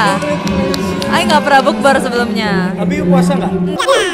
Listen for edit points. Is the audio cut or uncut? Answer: uncut